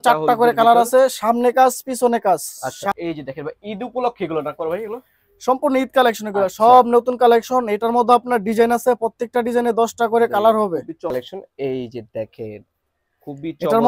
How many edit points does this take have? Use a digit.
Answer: 2